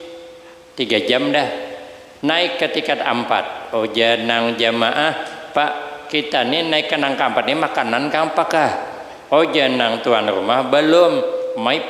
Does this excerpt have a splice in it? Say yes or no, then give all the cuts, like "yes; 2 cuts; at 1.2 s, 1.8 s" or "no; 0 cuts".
no; 0 cuts